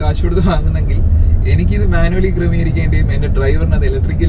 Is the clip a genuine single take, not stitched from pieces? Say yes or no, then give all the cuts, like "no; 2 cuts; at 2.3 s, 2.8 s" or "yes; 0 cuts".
yes; 0 cuts